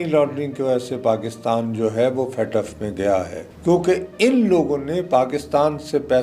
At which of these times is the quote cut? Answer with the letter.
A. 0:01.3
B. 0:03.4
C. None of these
B